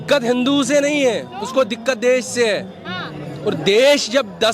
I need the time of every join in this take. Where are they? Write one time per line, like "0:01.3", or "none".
none